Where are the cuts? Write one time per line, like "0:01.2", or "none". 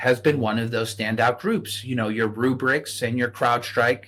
none